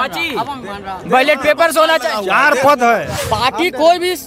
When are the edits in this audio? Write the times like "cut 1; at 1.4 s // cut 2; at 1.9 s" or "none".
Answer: cut 1; at 3.1 s